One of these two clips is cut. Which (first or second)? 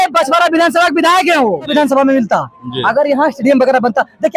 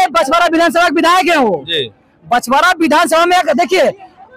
first